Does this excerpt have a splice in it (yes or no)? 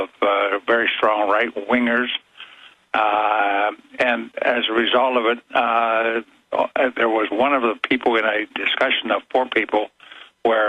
yes